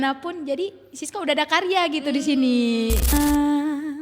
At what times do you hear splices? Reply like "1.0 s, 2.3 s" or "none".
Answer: 3.1 s